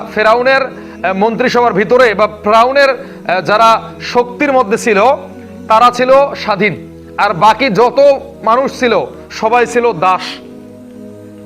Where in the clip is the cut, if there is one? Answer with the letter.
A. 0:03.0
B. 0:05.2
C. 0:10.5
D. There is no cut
C